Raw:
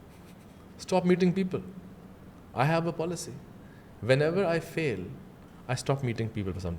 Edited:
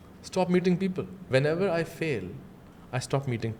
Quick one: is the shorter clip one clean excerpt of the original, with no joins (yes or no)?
no